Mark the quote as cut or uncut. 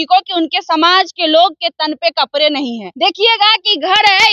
cut